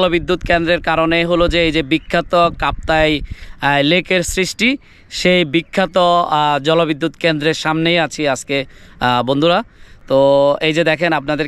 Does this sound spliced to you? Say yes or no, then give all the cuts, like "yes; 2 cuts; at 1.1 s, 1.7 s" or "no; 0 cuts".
no; 0 cuts